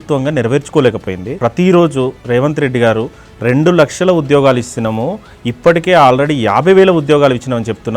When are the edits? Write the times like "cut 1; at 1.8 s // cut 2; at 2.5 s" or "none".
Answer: cut 1; at 1.3 s